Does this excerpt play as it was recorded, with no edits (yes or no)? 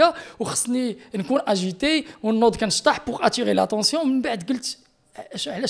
yes